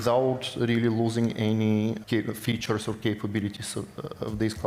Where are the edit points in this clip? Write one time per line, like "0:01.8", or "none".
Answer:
0:02.0